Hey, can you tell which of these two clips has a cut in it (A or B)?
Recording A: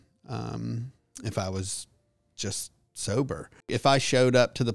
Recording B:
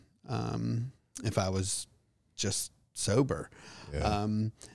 A